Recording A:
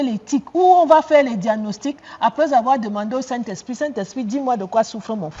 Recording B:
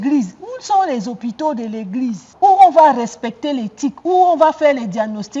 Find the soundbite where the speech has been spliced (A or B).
B